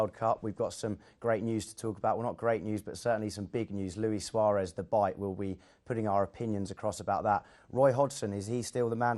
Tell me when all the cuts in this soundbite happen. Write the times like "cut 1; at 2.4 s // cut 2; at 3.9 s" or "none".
none